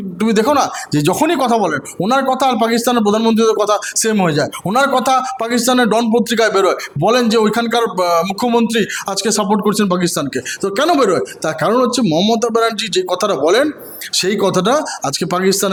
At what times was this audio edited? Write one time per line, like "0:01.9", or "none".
none

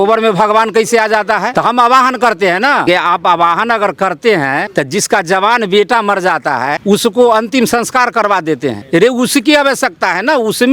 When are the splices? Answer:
0:01.5
0:02.9
0:04.7
0:06.8
0:08.8

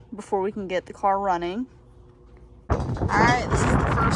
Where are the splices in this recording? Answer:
0:02.7

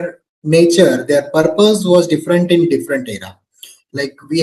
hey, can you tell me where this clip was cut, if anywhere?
none

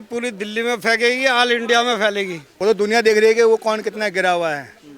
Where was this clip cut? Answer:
0:02.4

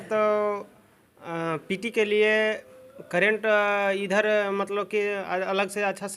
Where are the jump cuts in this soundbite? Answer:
none

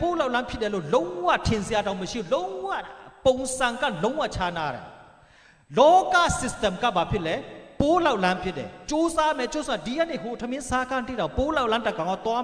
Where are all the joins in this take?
none

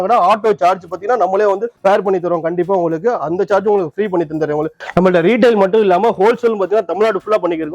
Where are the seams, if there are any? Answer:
0:01.7
0:04.8

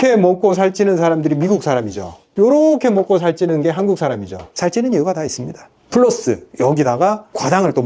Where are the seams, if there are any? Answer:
none

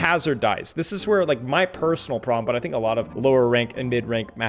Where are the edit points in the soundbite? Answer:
0:03.1

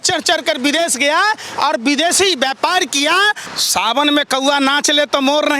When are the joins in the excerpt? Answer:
0:03.5

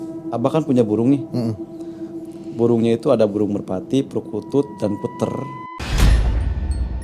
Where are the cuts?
0:05.6

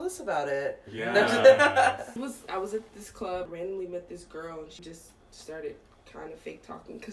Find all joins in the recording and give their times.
0:02.1

